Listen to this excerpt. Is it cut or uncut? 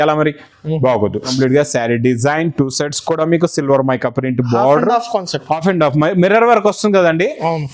cut